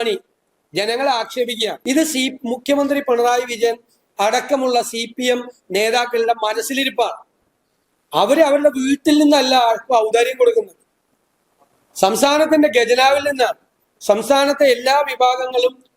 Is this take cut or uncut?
cut